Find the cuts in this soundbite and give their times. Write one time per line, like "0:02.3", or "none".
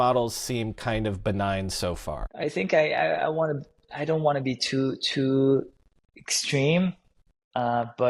0:02.3